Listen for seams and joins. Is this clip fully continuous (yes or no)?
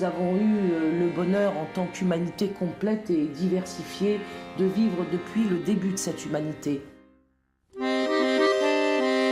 no